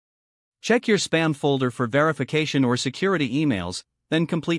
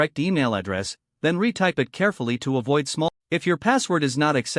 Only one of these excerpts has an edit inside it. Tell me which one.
second; 1 cut; at 3.1 s

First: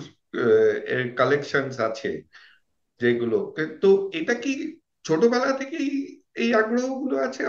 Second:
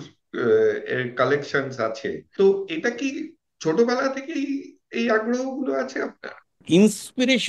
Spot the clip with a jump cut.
second; 2 cuts; at 2.3 s, 6.5 s

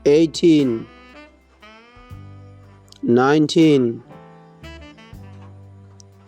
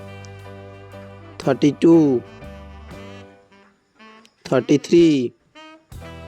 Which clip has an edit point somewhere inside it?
second; 4 cuts; at 1.2 s, 2.2 s, 4.4 s, 5.4 s

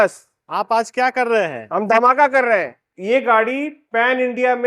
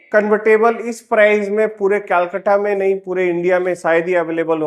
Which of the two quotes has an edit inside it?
first; 1 cut; at 2.9 s

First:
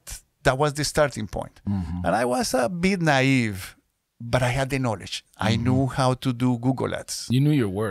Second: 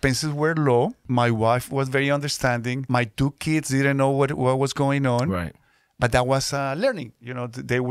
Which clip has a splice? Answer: second; 2 cuts; at 1.0 s, 2.8 s

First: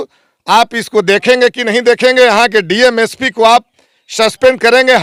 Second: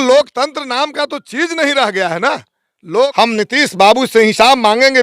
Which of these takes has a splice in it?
second; 1 cut; at 3.1 s

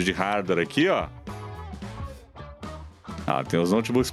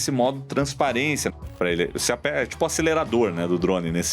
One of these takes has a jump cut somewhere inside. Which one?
second; 1 cut; at 1.4 s

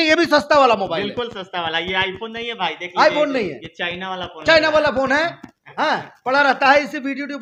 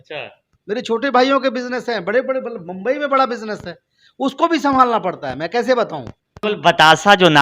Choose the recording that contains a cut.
second; 1 cut; at 6.4 s

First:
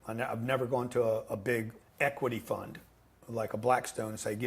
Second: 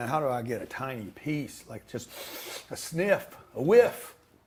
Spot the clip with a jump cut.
first; 1 cut; at 1.8 s

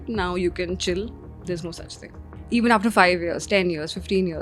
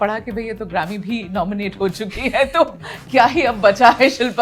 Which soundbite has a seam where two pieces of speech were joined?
first; 1 cut; at 2.3 s

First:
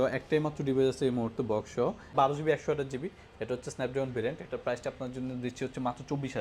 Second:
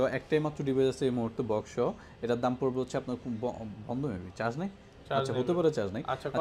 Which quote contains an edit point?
first; 1 cut; at 2.1 s

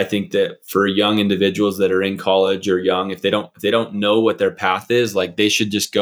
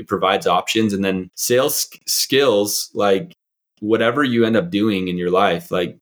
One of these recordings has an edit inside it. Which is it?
second; 1 cut; at 1.3 s

